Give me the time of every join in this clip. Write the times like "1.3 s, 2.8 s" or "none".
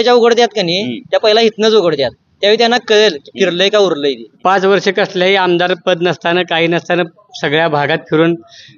4.3 s